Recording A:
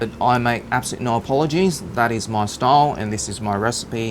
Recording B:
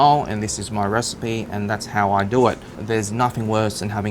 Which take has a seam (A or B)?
B